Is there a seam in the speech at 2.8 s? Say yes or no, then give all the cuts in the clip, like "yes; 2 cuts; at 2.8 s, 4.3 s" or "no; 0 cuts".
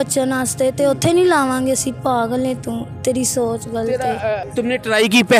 no; 1 cut; at 4.5 s